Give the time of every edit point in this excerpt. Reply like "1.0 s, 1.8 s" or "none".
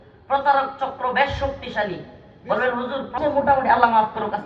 3.1 s